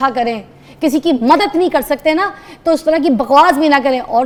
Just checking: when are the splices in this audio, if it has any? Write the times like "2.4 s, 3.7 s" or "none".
none

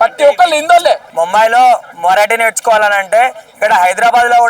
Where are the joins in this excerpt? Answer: 1.1 s

